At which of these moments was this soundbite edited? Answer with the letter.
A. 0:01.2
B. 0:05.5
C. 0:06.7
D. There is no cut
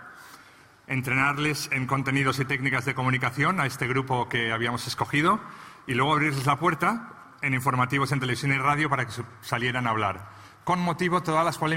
B